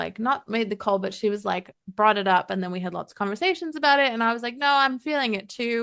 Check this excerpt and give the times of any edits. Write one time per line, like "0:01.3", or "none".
none